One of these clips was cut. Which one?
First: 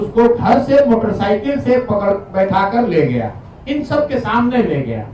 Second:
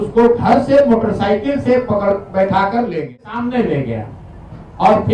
second; 1 cut; at 3.2 s

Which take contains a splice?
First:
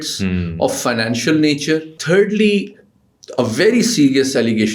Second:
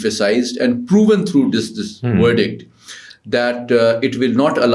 first; 1 cut; at 2.0 s

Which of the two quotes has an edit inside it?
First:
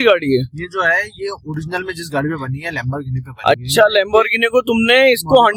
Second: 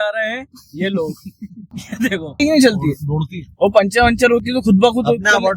second; 1 cut; at 2.4 s

